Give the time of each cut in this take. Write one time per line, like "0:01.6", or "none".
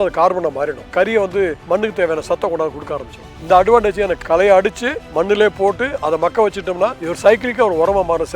0:01.0
0:04.2
0:07.1